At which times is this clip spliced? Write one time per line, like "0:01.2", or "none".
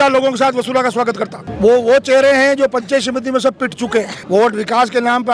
0:01.4
0:04.2